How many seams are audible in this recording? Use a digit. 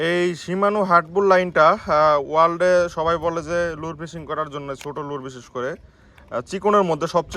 0